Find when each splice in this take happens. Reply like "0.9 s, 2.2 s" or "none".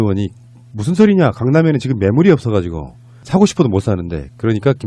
1.3 s